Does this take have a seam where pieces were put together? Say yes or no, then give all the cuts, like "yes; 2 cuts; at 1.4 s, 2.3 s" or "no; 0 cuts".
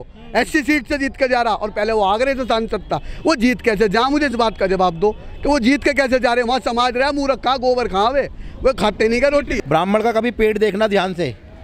yes; 1 cut; at 9.5 s